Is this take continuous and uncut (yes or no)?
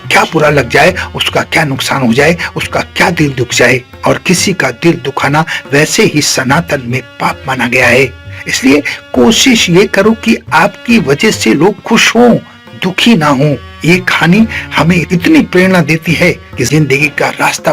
no